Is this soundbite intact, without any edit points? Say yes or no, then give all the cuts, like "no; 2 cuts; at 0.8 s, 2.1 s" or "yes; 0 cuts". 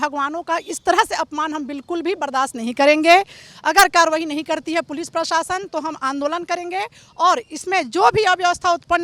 yes; 0 cuts